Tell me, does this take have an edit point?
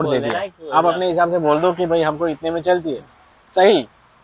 no; 0 cuts

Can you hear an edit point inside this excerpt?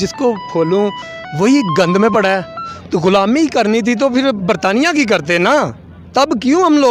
yes; 1 cut; at 2.8 s

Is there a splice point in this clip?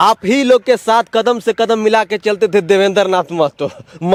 no; 0 cuts

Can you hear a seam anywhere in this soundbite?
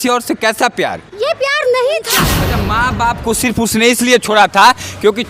yes; 1 cut; at 2.3 s

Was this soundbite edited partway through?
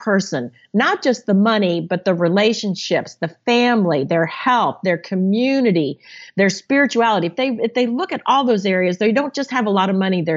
no; 0 cuts

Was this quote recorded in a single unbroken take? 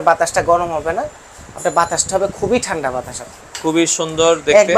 no; 1 cut; at 3.2 s

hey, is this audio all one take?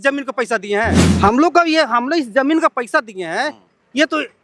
no; 1 cut; at 1.1 s

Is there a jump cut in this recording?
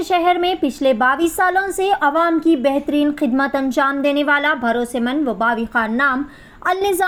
no; 0 cuts

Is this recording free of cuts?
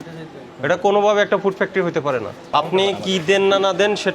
no; 1 cut; at 2.4 s

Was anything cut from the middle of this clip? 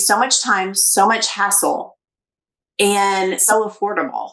no; 0 cuts

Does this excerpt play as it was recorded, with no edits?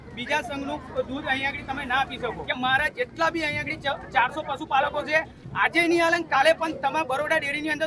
no; 1 cut; at 2.4 s

